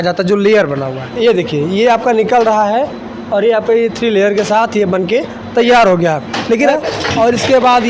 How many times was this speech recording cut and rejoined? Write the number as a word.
two